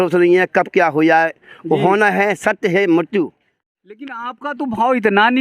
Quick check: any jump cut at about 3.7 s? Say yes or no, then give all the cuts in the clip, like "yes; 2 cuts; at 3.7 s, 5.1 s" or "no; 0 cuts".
yes; 1 cut; at 3.7 s